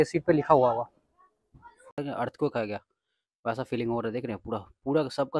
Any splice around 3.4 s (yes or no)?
no